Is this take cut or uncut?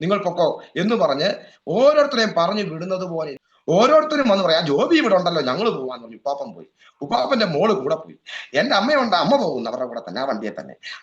cut